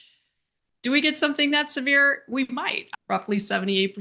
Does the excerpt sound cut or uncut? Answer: cut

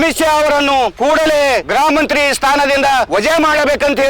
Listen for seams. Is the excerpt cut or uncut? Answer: cut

